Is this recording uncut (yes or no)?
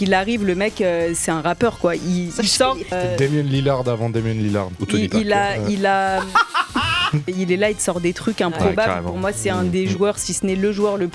no